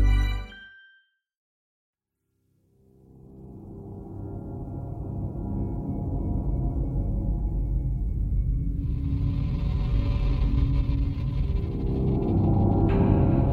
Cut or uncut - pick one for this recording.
uncut